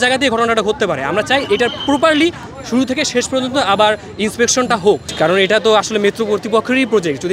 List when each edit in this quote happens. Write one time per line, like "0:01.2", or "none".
none